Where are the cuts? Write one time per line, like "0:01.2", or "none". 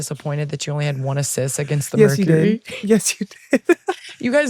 none